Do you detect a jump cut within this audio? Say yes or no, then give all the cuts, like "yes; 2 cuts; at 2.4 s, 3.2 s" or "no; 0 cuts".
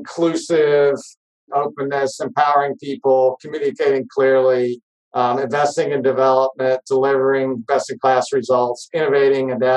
yes; 1 cut; at 1.4 s